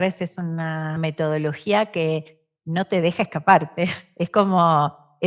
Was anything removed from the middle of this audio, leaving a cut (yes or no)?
yes